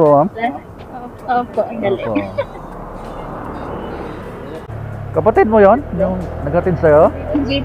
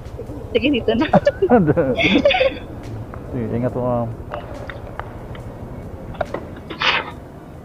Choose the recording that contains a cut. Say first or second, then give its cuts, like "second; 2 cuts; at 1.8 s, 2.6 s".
first; 1 cut; at 4.7 s